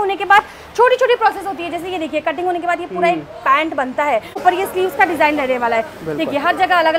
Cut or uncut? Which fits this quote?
cut